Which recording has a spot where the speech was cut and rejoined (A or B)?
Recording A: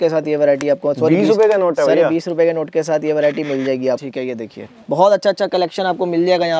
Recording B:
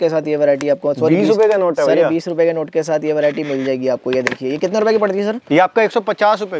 A